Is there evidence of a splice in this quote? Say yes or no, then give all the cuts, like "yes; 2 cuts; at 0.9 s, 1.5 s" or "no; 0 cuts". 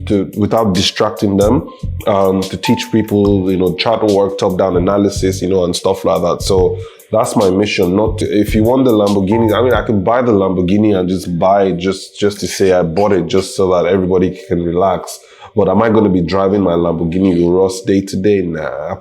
yes; 1 cut; at 8.2 s